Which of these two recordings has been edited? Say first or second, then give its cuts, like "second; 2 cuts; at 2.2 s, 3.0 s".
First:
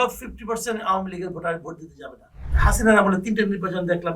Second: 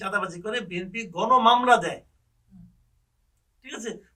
first; 1 cut; at 2.4 s